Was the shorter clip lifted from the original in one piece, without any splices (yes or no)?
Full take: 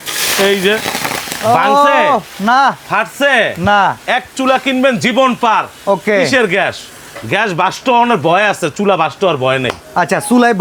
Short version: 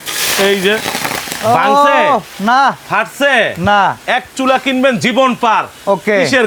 yes